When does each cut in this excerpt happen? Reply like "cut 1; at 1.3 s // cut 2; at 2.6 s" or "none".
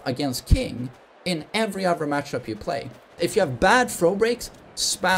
cut 1; at 3.1 s